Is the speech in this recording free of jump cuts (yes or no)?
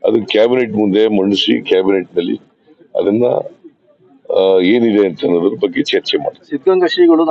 yes